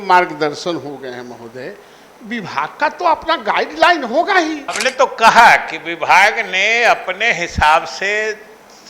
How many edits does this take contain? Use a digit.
1